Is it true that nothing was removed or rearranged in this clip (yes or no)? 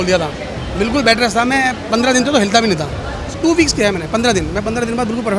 no